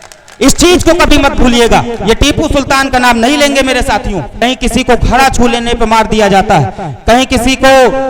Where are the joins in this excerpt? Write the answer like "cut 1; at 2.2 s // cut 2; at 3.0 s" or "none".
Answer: cut 1; at 4.4 s